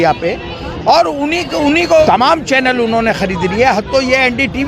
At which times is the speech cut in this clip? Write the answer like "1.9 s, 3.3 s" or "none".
2.0 s

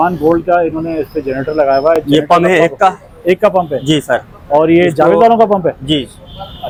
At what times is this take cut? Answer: none

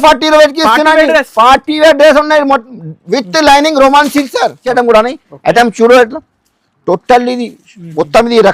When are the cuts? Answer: 4.6 s

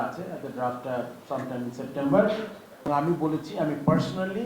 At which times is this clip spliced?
2.8 s

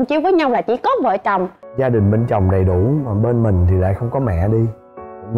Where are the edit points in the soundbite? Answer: 1.6 s

